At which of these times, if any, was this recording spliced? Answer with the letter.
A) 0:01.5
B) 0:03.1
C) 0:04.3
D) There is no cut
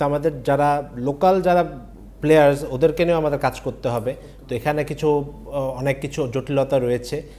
D